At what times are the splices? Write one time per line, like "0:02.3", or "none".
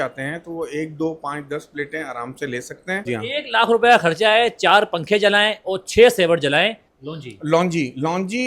0:03.0
0:06.8